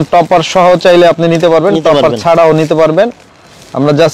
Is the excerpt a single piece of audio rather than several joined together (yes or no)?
yes